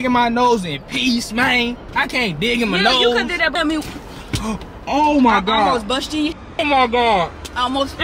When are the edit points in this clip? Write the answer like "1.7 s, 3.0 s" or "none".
3.5 s